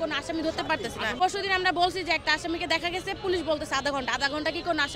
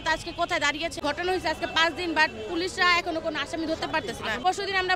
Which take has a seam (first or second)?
second